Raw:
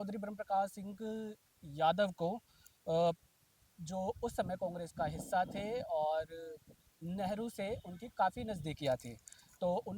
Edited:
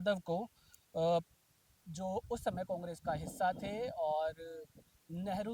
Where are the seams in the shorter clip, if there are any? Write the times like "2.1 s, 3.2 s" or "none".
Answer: none